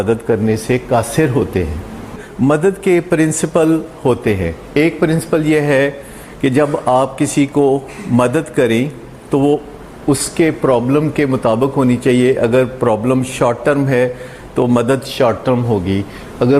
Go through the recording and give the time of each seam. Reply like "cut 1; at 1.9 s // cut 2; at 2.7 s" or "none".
cut 1; at 2.2 s